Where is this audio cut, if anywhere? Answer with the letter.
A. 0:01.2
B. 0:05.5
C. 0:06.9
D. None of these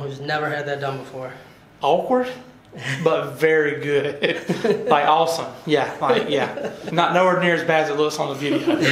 C